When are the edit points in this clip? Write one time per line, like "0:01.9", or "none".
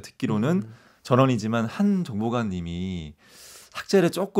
none